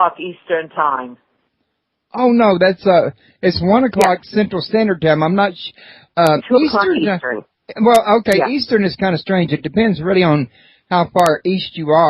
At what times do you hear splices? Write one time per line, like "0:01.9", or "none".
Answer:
0:04.2